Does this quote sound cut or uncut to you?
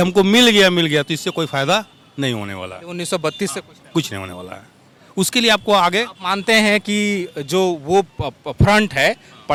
uncut